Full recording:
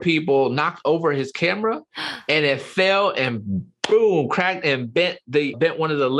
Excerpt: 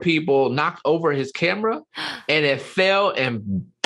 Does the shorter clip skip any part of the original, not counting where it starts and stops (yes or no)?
no